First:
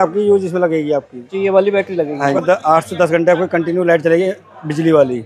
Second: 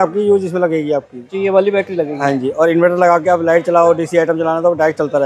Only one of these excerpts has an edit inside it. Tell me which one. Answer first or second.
first